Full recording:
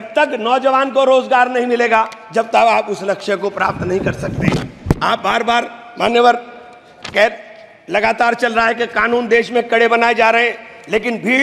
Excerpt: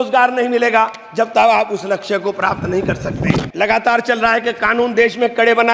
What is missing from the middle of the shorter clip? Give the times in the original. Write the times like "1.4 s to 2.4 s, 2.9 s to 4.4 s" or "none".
4.7 s to 7.8 s